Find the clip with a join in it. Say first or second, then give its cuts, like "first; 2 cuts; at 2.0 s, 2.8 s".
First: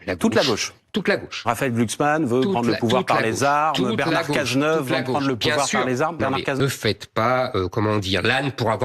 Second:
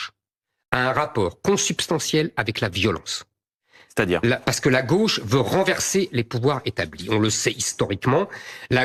first; 1 cut; at 6.6 s